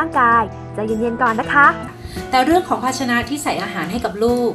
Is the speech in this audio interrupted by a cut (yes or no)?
yes